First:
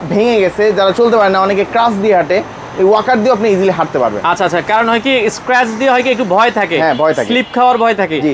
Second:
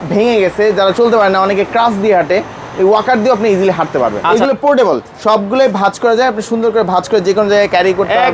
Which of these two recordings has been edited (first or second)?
second